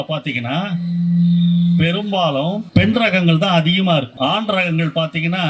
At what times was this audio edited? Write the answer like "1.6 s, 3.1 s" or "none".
2.6 s, 4.1 s